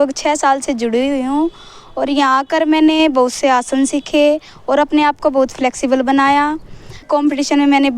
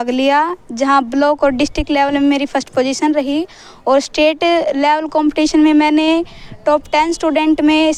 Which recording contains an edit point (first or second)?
first